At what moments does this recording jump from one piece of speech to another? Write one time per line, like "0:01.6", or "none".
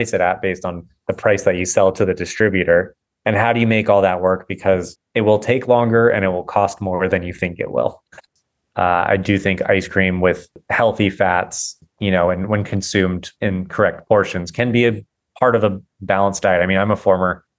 0:08.2
0:10.6
0:11.7
0:13.3